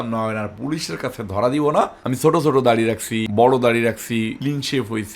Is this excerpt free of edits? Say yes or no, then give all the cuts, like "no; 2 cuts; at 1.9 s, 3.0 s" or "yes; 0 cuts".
no; 3 cuts; at 2.0 s, 3.3 s, 4.4 s